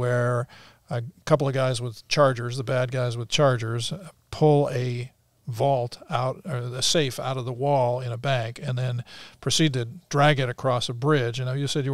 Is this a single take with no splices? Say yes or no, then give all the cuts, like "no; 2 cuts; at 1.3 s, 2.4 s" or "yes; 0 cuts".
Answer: yes; 0 cuts